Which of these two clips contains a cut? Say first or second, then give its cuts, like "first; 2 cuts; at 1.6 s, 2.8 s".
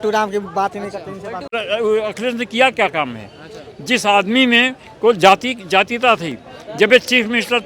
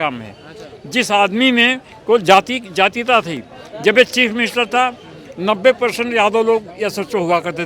first; 1 cut; at 1.6 s